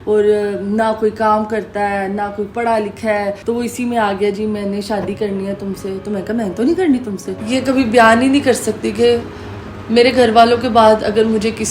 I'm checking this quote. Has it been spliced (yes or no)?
yes